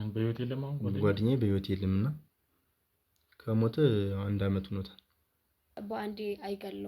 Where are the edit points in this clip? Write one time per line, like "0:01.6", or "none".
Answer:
0:05.7